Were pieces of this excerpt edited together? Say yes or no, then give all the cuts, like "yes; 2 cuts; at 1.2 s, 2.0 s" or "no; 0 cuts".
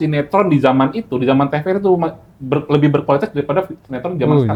no; 0 cuts